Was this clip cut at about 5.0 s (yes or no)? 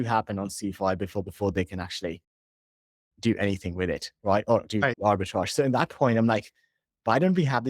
yes